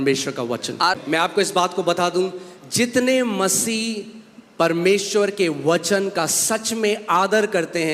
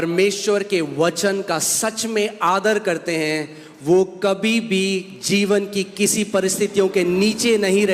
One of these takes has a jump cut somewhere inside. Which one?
first; 1 cut; at 1.2 s

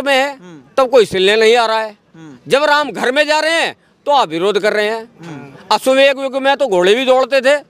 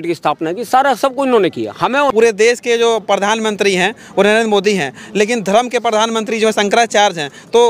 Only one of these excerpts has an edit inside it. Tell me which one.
second; 1 cut; at 2.1 s

